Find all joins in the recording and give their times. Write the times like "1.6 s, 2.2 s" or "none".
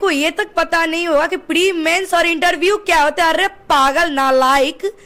none